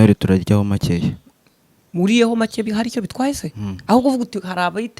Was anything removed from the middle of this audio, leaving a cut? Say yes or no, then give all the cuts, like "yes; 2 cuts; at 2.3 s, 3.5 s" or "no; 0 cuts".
no; 0 cuts